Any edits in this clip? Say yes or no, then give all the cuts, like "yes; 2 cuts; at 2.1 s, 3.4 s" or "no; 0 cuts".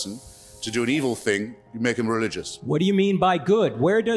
no; 0 cuts